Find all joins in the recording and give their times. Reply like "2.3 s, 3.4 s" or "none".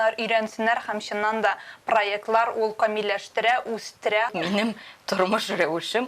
4.3 s